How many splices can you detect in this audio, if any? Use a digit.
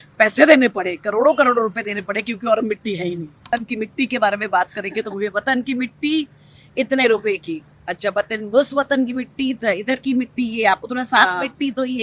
1